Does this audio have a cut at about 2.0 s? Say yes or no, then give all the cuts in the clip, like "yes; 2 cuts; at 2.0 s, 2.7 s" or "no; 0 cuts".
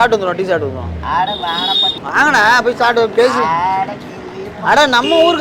yes; 1 cut; at 2.0 s